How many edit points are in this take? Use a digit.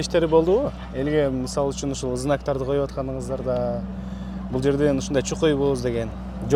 0